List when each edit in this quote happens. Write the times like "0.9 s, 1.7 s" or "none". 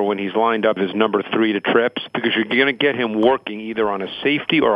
0.8 s, 2.1 s